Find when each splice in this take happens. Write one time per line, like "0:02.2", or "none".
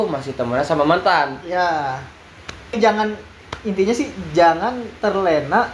0:02.7